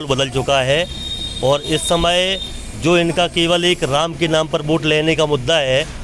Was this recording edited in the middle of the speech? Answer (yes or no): no